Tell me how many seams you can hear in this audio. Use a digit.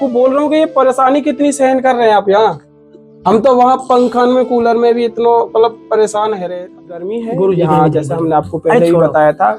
1